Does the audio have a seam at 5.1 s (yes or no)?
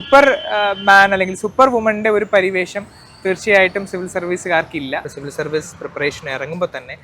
yes